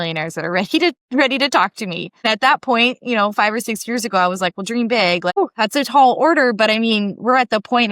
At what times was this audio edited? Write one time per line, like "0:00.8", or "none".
0:02.2
0:05.3